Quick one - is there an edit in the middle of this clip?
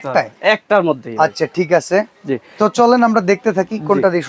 no; 0 cuts

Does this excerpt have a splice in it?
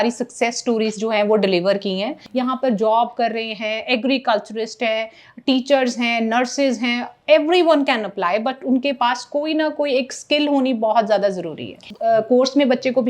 yes; 2 cuts; at 2.2 s, 11.9 s

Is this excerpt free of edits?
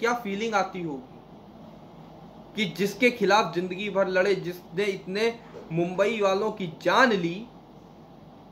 yes; 0 cuts

